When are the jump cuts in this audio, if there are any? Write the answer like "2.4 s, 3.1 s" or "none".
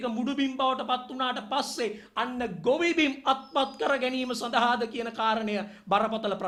none